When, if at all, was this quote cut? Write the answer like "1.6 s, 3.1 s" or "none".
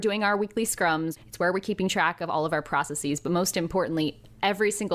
1.1 s